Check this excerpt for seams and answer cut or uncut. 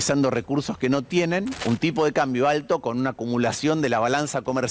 cut